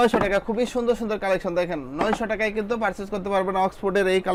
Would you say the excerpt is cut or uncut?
uncut